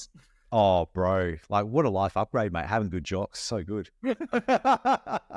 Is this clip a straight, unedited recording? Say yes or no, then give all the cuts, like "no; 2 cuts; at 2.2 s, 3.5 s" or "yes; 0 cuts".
yes; 0 cuts